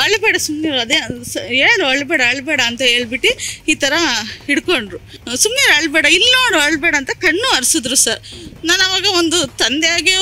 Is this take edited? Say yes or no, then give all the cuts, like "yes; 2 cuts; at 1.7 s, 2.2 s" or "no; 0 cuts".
no; 0 cuts